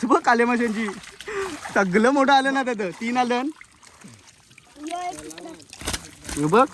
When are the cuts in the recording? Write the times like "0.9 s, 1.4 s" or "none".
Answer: none